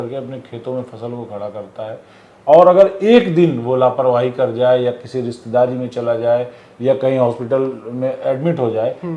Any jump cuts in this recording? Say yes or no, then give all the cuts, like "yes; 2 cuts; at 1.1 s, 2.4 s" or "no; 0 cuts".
no; 0 cuts